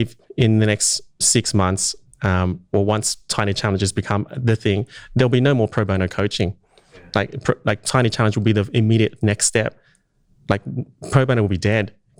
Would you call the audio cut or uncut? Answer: uncut